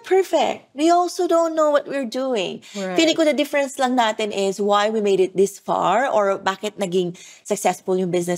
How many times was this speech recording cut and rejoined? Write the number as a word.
zero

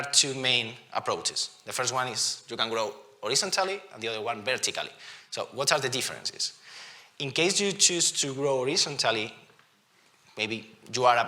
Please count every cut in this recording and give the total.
zero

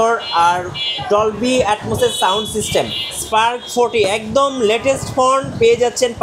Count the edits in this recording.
one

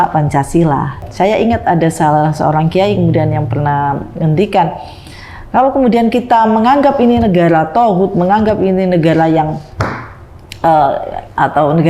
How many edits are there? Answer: one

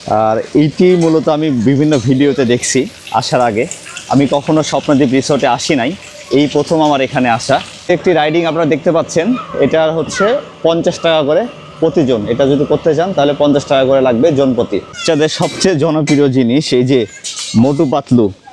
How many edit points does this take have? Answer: two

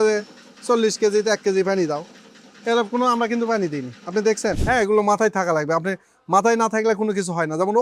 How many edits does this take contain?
one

